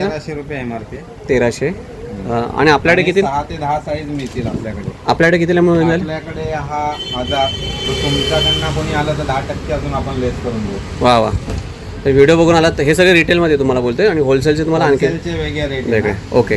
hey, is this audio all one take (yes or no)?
yes